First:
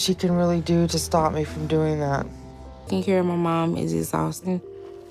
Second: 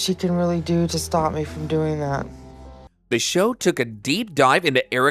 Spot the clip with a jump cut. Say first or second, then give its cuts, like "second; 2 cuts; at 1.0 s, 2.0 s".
first; 1 cut; at 2.8 s